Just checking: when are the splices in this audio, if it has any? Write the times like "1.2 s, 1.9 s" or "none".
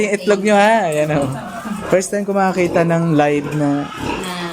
1.8 s